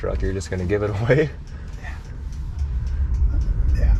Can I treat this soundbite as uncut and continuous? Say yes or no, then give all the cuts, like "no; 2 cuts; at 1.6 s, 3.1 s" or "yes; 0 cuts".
yes; 0 cuts